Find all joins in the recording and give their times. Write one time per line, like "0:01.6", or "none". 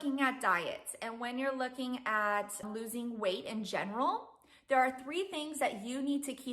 0:02.6

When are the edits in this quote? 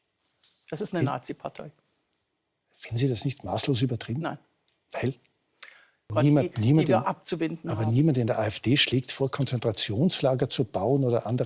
0:06.1

